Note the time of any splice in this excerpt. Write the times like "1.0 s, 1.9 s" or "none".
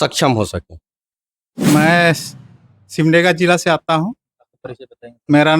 1.0 s